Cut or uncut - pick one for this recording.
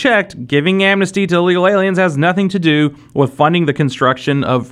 uncut